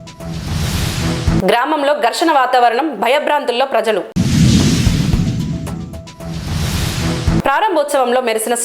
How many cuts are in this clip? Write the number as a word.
one